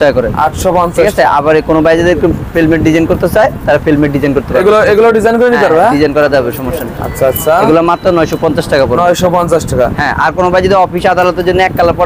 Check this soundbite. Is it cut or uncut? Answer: uncut